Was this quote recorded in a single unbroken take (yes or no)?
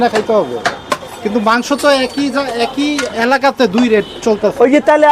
yes